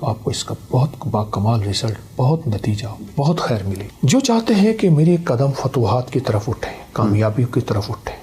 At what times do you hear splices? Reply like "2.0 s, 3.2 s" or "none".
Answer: 3.9 s